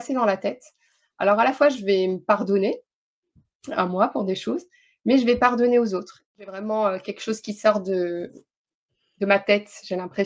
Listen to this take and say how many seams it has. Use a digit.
1